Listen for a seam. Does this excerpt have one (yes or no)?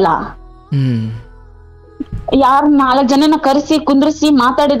no